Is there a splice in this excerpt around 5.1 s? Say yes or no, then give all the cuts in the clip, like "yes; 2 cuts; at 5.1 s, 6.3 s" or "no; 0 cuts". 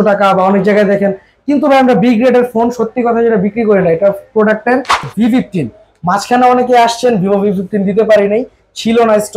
yes; 1 cut; at 5.1 s